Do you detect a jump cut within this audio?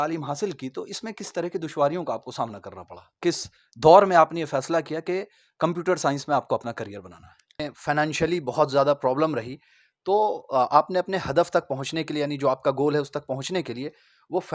yes; 2 cuts; at 3.3 s, 7.7 s

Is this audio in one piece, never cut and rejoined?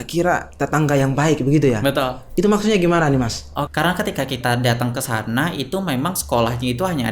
no; 1 cut; at 3.7 s

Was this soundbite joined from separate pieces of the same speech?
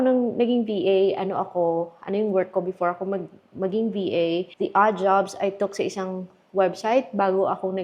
no; 0 cuts

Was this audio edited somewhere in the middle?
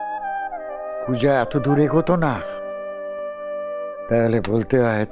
no; 0 cuts

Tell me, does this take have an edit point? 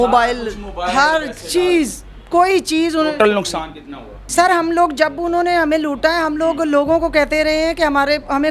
yes; 1 cut; at 4.2 s

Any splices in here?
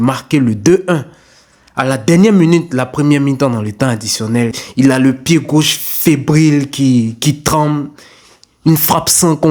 no; 0 cuts

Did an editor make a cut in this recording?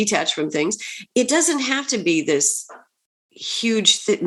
no; 0 cuts

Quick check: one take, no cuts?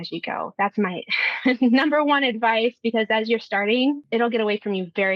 no; 1 cut; at 4.0 s

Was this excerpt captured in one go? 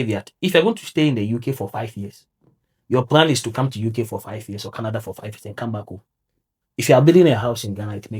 yes; 0 cuts

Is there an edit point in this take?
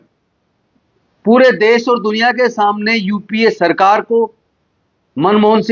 no; 0 cuts

